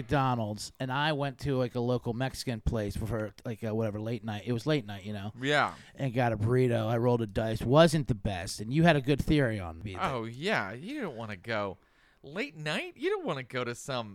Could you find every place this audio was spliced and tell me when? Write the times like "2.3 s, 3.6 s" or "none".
9.8 s